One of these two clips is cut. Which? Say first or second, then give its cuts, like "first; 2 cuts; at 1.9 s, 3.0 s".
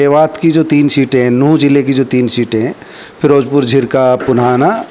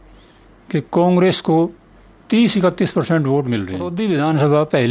second; 1 cut; at 3.9 s